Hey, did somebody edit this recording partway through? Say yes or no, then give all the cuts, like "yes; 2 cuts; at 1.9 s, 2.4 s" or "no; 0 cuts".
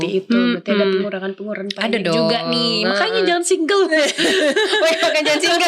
no; 0 cuts